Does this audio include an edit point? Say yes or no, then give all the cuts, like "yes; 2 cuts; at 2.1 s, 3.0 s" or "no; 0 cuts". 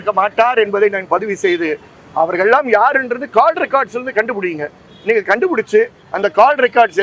no; 0 cuts